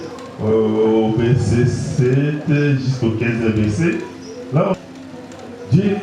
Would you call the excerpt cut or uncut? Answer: cut